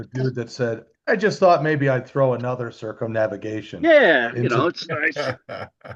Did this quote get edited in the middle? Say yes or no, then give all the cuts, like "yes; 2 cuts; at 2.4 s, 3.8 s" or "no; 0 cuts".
no; 0 cuts